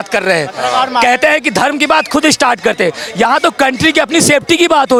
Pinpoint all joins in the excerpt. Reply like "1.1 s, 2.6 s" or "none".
none